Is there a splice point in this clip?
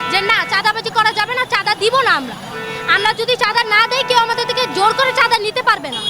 no; 0 cuts

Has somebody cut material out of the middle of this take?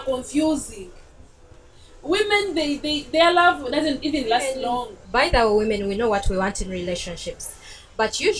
yes; 1 cut; at 4.9 s

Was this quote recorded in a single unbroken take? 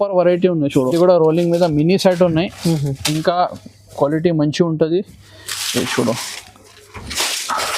no; 1 cut; at 0.9 s

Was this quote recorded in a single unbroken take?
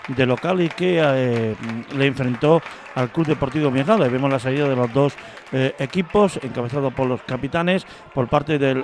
yes; 0 cuts

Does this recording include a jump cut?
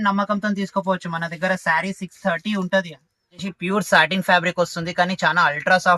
yes; 1 cut; at 3.5 s

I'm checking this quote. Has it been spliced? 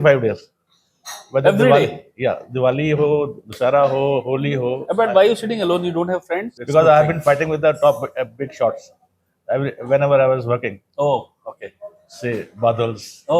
yes; 1 cut; at 6.6 s

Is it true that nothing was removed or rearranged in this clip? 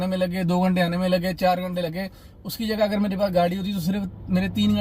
yes; 0 cuts

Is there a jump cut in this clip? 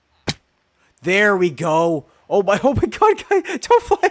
no; 0 cuts

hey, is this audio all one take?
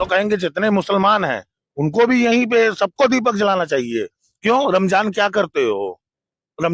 yes; 0 cuts

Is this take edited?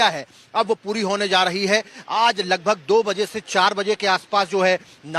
no; 0 cuts

